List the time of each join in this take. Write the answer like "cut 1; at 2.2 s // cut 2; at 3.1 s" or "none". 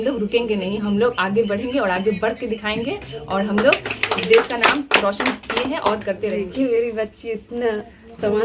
cut 1; at 6.5 s